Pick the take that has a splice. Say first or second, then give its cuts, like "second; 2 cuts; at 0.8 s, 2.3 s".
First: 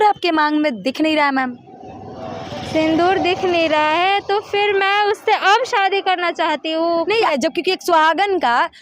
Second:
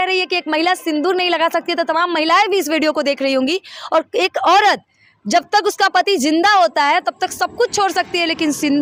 first; 1 cut; at 7.3 s